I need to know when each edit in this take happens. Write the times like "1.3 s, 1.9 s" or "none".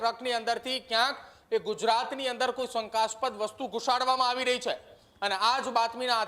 none

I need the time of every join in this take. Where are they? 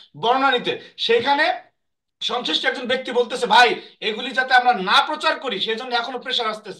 none

